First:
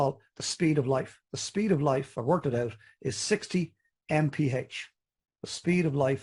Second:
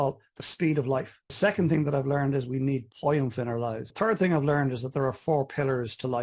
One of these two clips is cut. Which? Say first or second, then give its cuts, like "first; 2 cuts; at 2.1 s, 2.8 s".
second; 2 cuts; at 1.2 s, 3.9 s